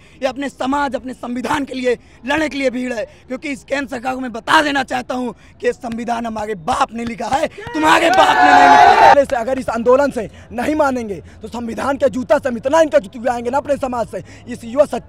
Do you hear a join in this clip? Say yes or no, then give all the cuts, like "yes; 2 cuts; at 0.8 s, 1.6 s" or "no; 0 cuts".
yes; 1 cut; at 9.1 s